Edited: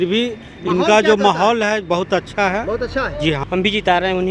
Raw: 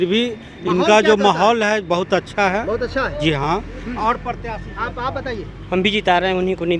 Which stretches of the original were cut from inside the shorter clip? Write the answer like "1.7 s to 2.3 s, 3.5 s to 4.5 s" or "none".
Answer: 3.4 s to 5.6 s